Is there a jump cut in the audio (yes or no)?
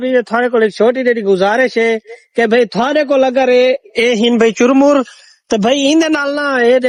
no